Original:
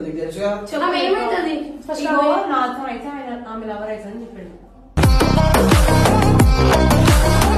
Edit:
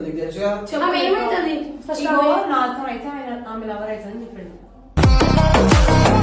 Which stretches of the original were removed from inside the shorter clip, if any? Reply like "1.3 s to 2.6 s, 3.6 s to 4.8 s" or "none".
none